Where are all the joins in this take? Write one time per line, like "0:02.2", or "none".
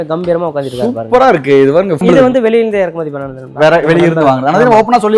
0:02.0